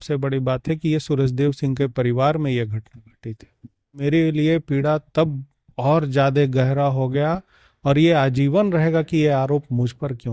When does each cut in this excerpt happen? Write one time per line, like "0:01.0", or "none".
0:04.0